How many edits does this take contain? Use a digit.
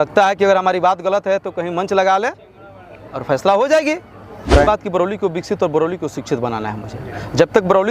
1